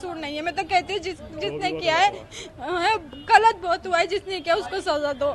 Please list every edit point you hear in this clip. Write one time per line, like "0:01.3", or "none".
none